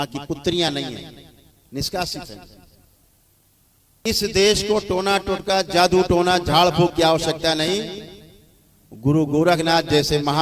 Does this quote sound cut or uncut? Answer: cut